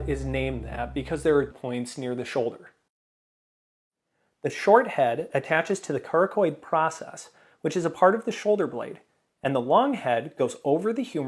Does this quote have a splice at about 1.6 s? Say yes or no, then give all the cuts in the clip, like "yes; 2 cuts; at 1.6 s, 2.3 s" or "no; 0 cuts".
yes; 1 cut; at 1.6 s